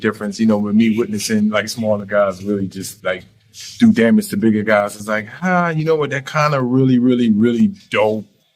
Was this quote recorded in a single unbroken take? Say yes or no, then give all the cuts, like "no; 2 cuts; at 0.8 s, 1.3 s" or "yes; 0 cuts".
yes; 0 cuts